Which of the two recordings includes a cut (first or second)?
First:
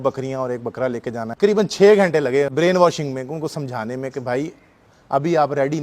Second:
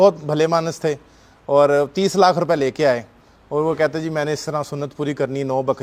first